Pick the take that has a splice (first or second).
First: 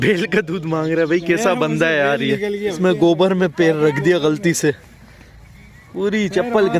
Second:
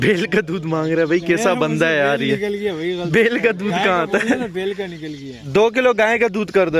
first